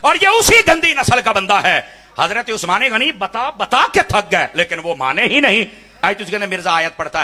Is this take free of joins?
no; 1 cut; at 6.0 s

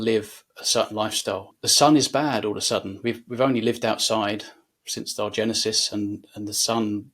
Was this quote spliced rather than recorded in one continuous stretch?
yes; 1 cut; at 1.6 s

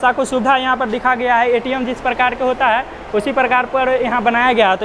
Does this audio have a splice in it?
no; 0 cuts

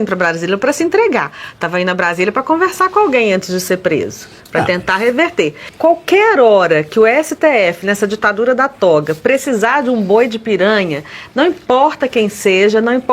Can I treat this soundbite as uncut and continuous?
no; 1 cut; at 5.7 s

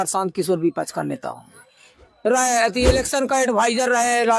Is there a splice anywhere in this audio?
yes; 1 cut; at 2.1 s

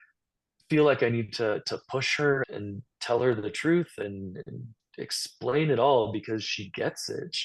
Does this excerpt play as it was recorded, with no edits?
no; 1 cut; at 2.5 s

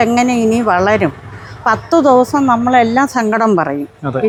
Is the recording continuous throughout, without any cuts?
yes; 0 cuts

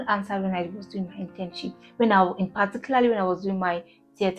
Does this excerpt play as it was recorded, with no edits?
yes; 0 cuts

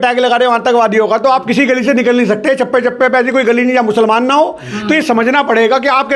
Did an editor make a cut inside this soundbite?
no; 0 cuts

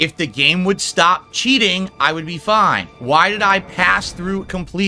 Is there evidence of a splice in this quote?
no; 0 cuts

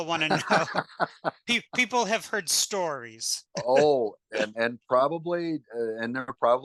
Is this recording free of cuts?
yes; 0 cuts

